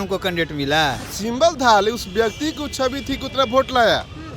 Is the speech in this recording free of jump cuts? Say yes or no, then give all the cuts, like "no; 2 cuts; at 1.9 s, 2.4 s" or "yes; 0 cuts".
no; 1 cut; at 1.1 s